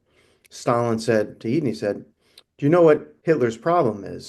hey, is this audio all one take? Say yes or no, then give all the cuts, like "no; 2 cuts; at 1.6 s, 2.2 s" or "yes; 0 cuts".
no; 1 cut; at 3.1 s